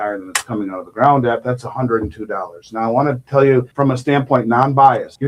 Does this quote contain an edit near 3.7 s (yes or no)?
yes